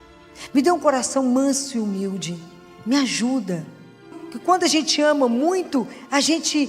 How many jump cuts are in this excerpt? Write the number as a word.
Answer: one